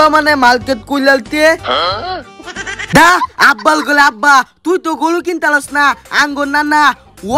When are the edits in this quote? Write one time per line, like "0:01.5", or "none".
0:02.8